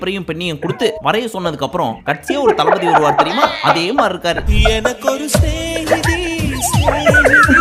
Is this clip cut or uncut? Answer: uncut